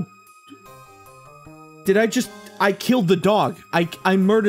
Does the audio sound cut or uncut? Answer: uncut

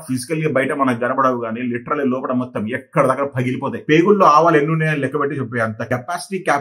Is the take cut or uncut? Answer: cut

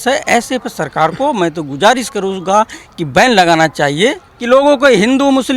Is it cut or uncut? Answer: cut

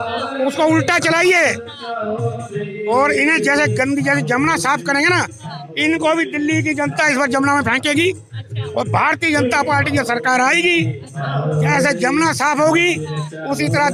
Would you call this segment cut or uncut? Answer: uncut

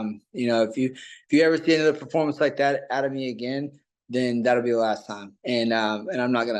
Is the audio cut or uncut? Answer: uncut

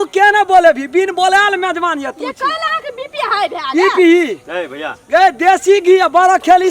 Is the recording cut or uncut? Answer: uncut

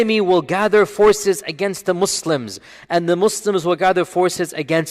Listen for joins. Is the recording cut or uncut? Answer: uncut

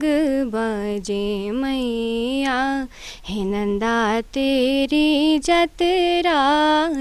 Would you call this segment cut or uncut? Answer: uncut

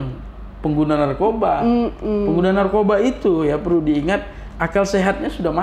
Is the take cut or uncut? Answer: uncut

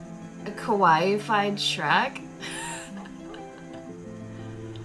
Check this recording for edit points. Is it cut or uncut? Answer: uncut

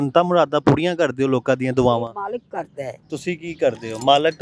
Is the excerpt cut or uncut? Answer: uncut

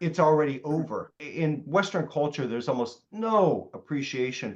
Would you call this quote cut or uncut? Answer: cut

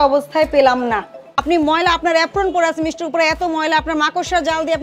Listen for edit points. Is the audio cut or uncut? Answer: cut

